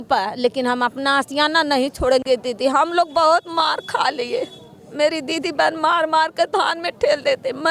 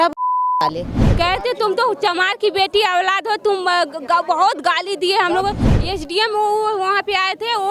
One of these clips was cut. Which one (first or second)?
second